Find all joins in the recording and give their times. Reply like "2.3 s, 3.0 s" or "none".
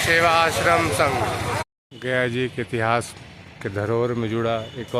1.6 s